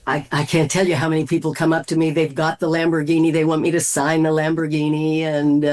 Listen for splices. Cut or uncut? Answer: uncut